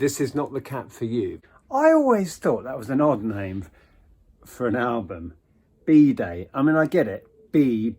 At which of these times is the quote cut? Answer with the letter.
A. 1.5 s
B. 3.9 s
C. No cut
A